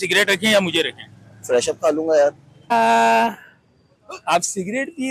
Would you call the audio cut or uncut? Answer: uncut